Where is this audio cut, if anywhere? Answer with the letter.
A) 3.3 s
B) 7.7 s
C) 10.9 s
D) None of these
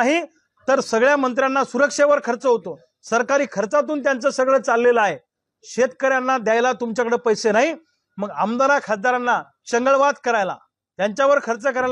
D